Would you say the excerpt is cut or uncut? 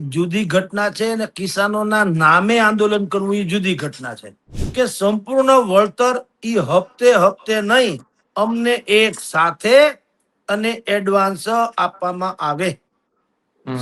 cut